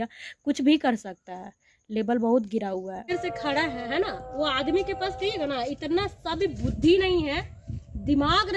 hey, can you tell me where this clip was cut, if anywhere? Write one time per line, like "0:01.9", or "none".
0:03.1